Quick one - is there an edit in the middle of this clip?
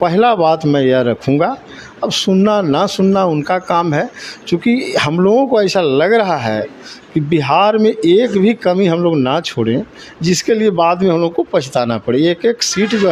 no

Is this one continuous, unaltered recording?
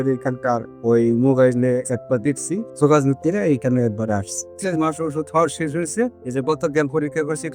no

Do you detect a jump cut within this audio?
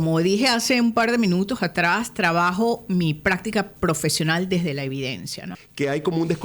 yes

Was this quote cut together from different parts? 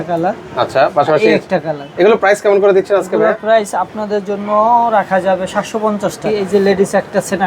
yes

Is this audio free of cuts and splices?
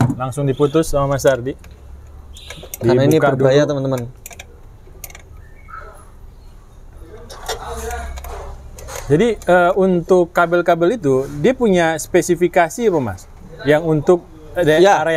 yes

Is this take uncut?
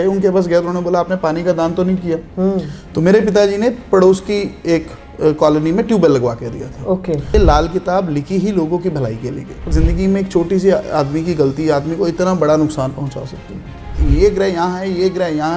no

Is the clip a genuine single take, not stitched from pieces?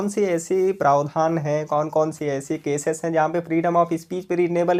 yes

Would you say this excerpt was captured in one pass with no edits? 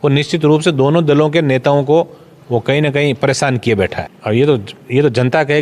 no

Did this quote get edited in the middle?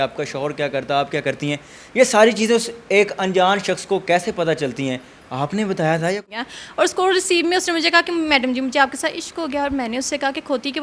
yes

